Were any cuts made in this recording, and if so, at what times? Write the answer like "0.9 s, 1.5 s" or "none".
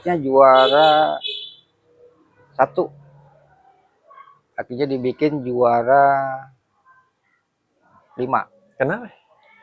none